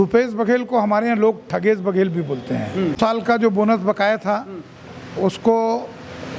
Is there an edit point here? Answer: yes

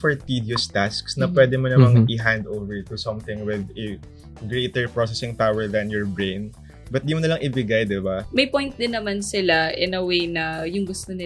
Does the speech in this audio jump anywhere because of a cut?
yes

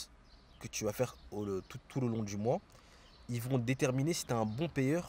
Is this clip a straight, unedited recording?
yes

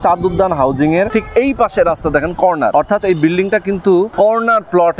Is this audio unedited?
no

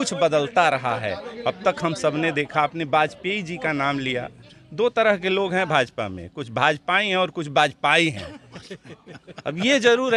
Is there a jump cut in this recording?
no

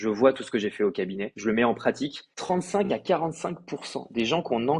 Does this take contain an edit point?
yes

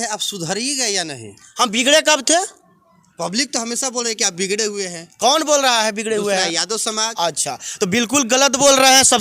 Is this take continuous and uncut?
yes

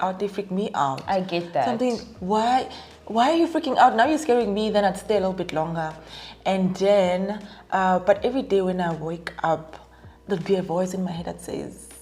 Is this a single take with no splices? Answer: yes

